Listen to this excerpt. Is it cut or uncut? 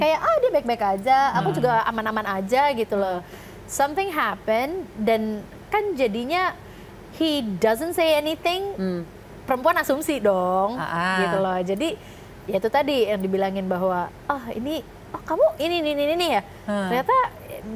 uncut